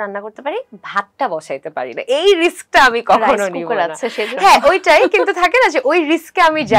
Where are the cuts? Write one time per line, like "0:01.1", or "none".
none